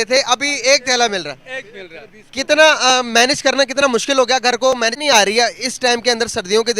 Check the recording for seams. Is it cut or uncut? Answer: cut